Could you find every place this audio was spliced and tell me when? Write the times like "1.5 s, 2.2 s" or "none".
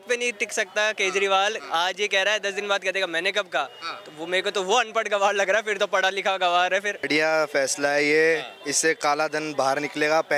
7.1 s